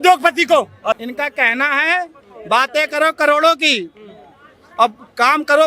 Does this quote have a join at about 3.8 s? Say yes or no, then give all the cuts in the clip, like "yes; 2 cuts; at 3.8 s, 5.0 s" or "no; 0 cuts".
no; 1 cut; at 1.1 s